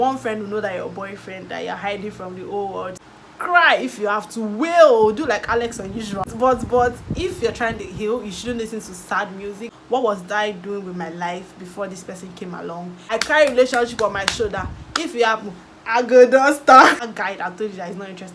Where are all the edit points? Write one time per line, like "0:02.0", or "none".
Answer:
0:03.0
0:06.3
0:09.7
0:13.0
0:17.0